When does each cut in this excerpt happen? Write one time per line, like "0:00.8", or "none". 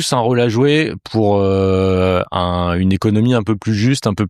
none